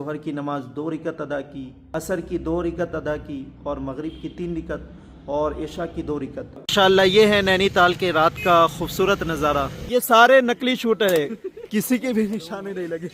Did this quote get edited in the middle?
yes; 2 cuts; at 6.6 s, 9.8 s

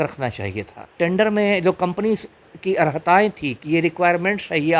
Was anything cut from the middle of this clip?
yes; 1 cut; at 1.0 s

